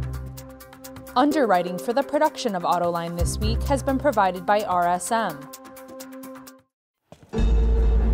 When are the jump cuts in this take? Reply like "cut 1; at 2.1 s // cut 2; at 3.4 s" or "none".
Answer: cut 1; at 1.1 s // cut 2; at 5.4 s // cut 3; at 6.5 s

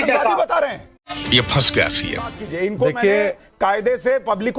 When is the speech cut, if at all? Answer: cut 1; at 2.4 s

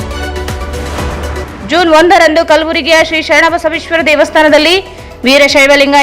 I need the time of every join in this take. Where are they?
cut 1; at 1.5 s

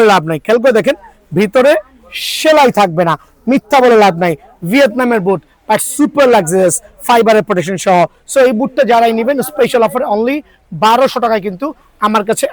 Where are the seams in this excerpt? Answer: none

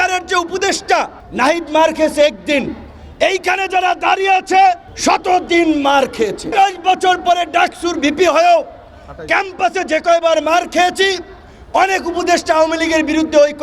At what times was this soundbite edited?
cut 1; at 1.2 s // cut 2; at 4.9 s // cut 3; at 6.5 s

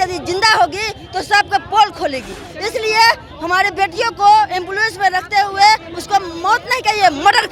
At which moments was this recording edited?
none

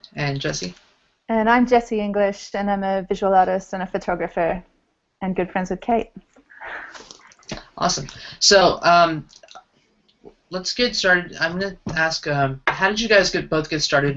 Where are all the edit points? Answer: cut 1; at 6.0 s

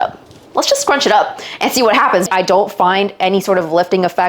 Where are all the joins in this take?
cut 1; at 2.3 s

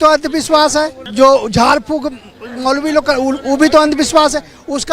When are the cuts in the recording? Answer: cut 1; at 1.0 s

